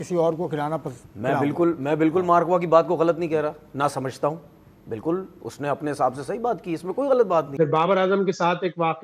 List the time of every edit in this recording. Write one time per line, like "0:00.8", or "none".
0:07.6